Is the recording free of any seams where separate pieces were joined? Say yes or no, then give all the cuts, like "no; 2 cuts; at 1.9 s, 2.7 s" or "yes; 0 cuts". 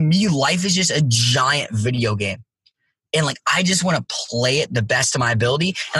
yes; 0 cuts